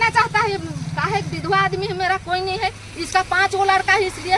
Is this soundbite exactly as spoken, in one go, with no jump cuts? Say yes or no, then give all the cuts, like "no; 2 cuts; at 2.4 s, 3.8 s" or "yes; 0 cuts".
yes; 0 cuts